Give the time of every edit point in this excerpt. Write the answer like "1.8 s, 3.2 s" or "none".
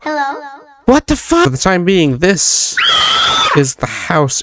1.4 s